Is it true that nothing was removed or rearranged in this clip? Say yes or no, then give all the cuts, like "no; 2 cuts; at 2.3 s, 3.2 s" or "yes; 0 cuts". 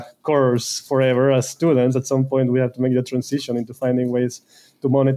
yes; 0 cuts